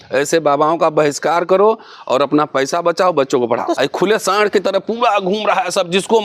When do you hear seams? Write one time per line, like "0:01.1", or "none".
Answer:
0:03.8